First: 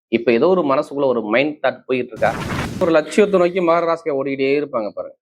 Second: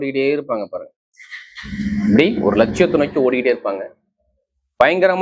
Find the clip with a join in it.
first; 1 cut; at 2.8 s

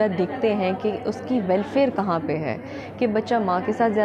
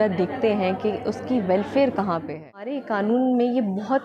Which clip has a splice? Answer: second; 1 cut; at 2.8 s

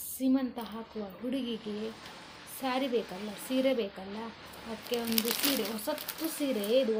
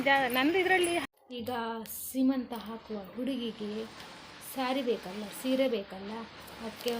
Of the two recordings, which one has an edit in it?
second; 1 cut; at 1.0 s

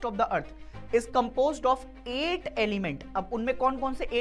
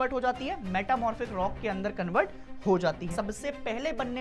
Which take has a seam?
second; 1 cut; at 3.1 s

